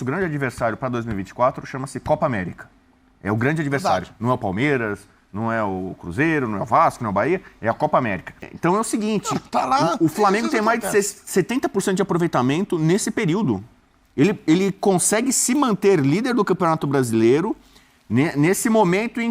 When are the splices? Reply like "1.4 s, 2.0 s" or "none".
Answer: 8.4 s